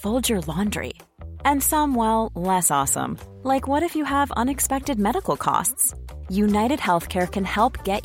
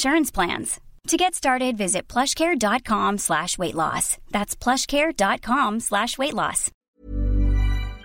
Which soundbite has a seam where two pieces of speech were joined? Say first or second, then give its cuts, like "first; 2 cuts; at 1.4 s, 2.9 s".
second; 1 cut; at 6.9 s